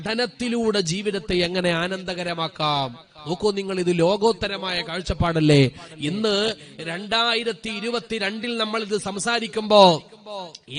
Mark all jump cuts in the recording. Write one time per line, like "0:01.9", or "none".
none